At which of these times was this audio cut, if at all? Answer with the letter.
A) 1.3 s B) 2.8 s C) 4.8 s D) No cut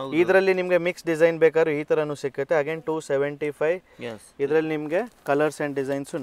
D